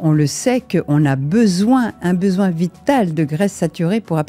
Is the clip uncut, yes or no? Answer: yes